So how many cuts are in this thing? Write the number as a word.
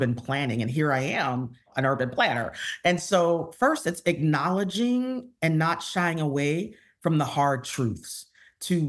one